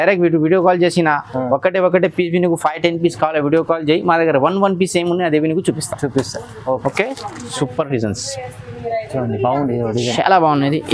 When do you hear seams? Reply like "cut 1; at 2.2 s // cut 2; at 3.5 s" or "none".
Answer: cut 1; at 7.5 s